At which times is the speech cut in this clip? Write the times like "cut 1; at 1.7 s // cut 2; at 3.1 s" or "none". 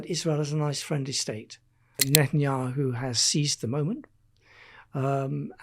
cut 1; at 2.0 s